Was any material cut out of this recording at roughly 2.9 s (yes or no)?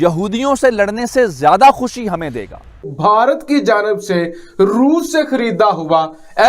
yes